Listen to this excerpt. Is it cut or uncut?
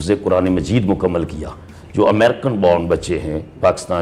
uncut